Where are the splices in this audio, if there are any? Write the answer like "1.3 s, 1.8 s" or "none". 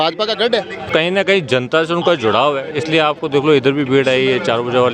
0.9 s